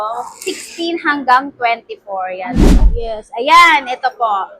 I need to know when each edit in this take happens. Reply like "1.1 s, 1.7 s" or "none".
2.8 s

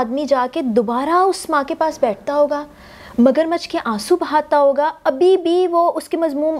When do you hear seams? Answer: none

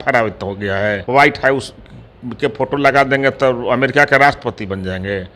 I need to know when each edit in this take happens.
1.0 s

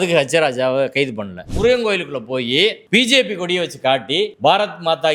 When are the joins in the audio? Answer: 1.5 s, 4.3 s

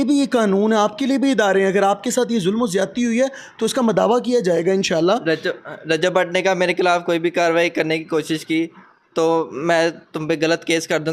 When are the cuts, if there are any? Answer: none

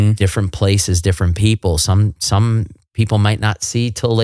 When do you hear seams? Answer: none

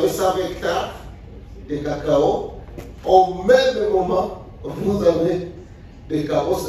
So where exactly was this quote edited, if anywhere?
none

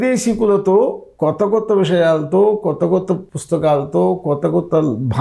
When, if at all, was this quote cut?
3.3 s

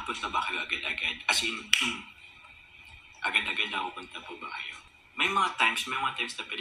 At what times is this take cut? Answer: 4.8 s

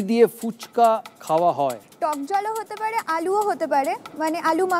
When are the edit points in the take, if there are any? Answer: 1.9 s

